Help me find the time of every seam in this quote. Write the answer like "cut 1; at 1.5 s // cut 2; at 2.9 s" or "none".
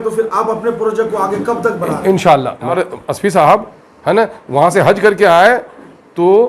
cut 1; at 2.8 s